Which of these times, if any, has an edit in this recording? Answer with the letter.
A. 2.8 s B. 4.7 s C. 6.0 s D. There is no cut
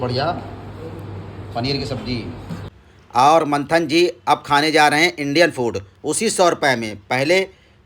A